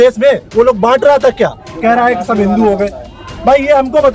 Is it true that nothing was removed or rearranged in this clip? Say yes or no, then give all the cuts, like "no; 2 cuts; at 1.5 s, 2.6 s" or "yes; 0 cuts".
no; 1 cut; at 1.7 s